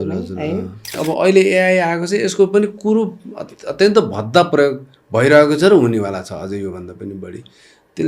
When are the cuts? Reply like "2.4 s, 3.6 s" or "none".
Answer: 1.0 s